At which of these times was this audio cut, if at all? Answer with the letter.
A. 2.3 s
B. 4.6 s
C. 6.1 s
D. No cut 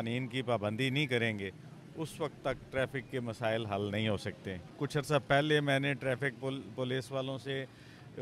B